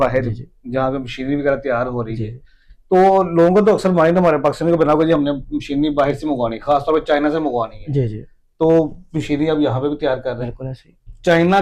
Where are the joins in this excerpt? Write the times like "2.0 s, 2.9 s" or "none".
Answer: none